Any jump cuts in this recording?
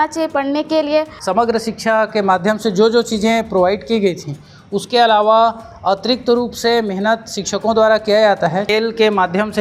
yes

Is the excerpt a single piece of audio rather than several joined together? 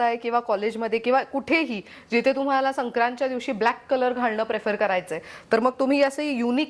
yes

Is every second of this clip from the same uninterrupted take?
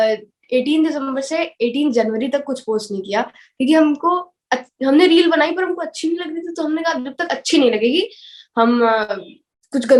yes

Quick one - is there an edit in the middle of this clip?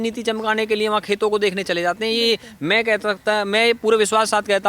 no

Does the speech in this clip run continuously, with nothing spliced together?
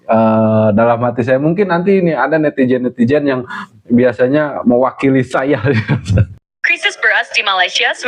no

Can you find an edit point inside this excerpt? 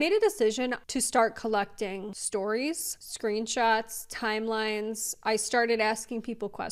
yes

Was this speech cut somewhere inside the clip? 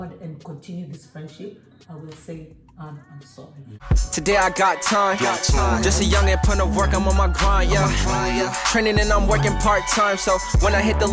yes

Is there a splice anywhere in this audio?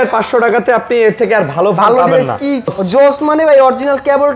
yes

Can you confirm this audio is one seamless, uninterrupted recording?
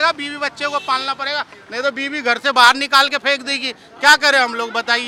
yes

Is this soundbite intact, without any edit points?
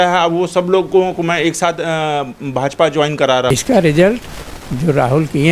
no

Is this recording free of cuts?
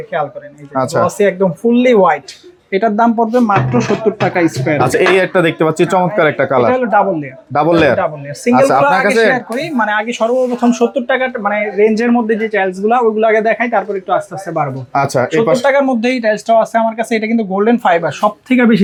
yes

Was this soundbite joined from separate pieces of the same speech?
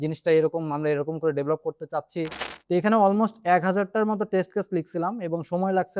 yes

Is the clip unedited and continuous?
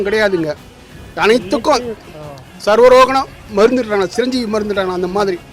yes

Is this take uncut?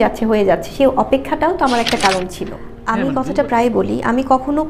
no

